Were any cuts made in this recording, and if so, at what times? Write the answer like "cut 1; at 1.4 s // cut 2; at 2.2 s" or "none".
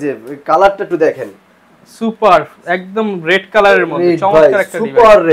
none